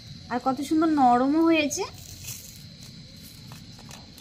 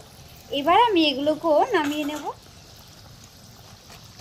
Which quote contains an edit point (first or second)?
second